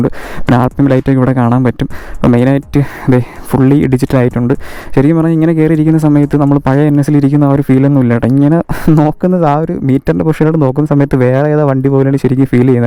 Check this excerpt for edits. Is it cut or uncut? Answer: uncut